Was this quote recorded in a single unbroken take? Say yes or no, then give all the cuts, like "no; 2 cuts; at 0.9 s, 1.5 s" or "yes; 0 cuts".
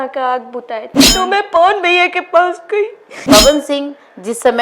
no; 2 cuts; at 1.0 s, 3.1 s